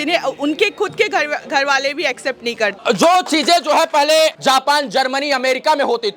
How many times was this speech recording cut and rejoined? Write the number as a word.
two